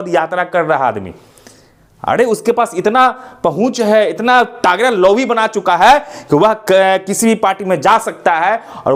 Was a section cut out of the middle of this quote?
no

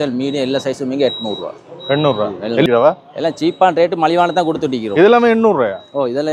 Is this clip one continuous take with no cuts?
no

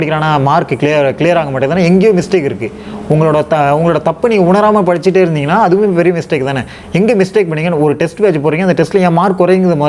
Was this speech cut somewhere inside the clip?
no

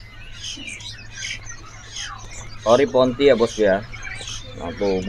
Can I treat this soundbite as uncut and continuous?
yes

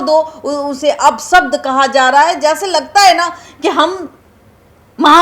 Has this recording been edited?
no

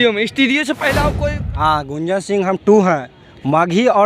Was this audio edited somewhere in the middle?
yes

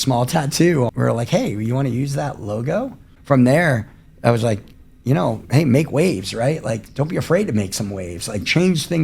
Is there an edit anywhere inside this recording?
yes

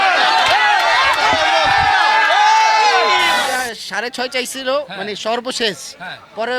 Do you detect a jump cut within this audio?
yes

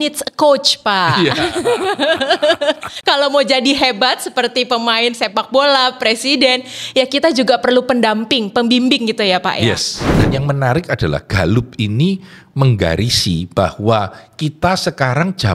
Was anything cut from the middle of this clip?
yes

